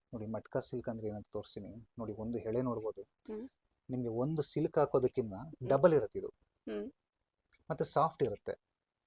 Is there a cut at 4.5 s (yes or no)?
no